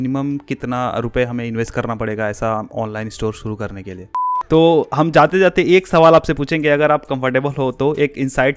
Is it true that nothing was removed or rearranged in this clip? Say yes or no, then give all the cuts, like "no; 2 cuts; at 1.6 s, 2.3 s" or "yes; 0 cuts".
no; 1 cut; at 4.3 s